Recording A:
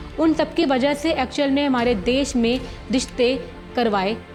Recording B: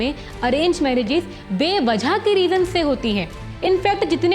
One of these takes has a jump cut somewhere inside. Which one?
B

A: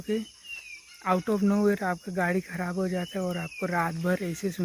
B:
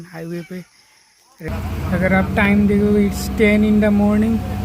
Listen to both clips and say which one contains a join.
B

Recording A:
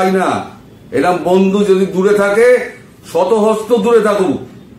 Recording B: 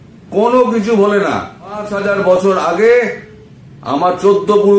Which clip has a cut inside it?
B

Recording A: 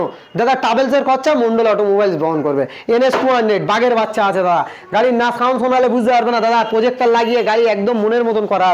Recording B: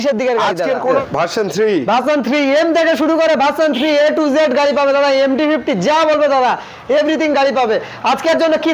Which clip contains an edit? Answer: B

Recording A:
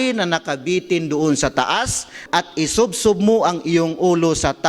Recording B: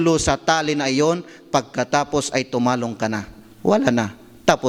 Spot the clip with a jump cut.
A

